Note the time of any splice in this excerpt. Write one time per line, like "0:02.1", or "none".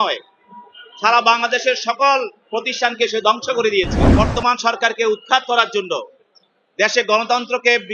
0:04.1

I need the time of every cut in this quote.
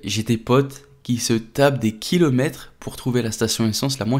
none

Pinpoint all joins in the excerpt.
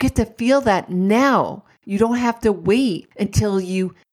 0:03.1

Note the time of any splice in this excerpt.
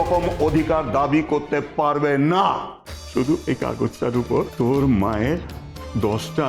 0:03.4
0:04.5

